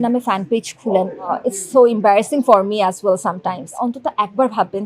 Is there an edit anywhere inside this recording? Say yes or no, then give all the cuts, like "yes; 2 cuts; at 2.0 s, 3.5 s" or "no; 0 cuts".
yes; 2 cuts; at 1.3 s, 3.8 s